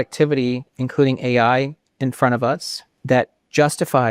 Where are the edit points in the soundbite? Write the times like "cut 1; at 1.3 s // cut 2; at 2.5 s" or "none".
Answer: cut 1; at 2.9 s